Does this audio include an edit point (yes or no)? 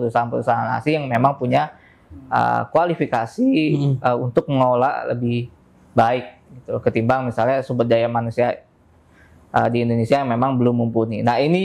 no